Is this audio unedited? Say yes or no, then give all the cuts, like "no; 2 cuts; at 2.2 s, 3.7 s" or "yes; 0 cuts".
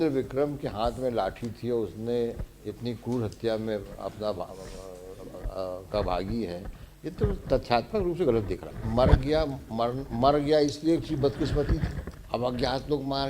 no; 2 cuts; at 8.8 s, 12.0 s